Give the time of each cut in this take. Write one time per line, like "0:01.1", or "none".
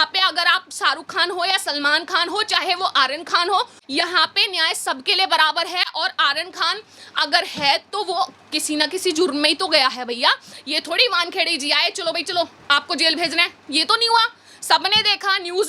none